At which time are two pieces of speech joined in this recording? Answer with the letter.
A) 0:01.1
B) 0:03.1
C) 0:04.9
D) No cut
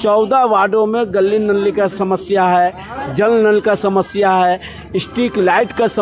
D